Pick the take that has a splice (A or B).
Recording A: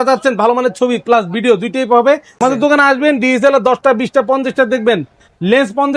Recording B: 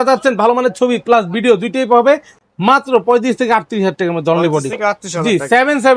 A